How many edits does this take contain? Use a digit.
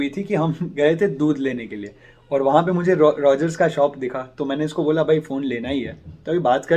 0